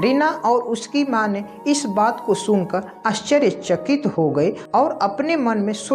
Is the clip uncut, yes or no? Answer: no